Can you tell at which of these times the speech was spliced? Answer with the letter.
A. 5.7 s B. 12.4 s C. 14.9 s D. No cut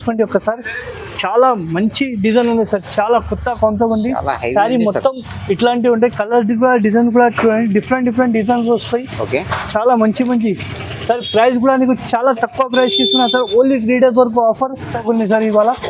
C